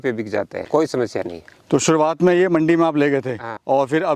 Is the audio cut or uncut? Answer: uncut